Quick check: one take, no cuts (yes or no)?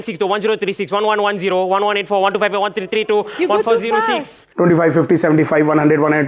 no